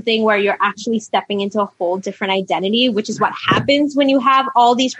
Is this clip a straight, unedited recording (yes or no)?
yes